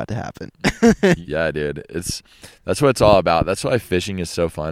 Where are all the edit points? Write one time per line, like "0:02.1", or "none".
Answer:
0:01.2